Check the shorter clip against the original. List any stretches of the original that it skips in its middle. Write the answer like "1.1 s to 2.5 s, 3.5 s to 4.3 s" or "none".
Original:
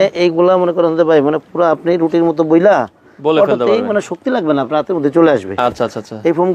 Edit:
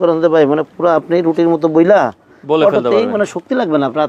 none